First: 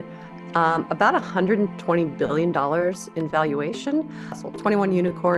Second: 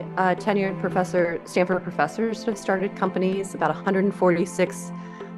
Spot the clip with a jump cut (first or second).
first